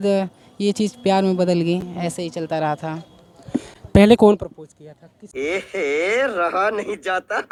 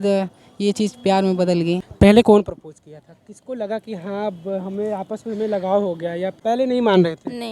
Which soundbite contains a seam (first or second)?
second